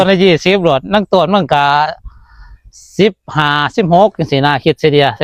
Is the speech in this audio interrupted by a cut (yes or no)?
no